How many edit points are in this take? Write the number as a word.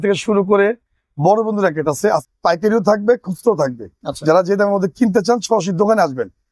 zero